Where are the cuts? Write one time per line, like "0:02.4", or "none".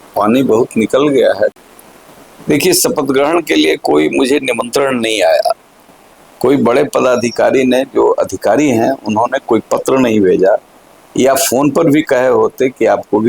0:01.6